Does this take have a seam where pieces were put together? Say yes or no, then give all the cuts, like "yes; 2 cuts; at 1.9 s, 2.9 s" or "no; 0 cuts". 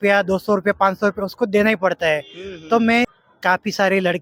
yes; 1 cut; at 3.2 s